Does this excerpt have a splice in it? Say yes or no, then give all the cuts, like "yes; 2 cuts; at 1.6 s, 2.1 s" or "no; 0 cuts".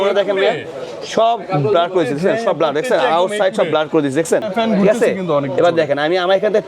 yes; 1 cut; at 4.5 s